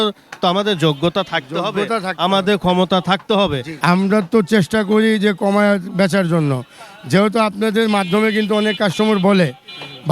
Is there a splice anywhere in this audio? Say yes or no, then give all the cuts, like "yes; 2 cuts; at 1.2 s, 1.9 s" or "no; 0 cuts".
yes; 1 cut; at 3.7 s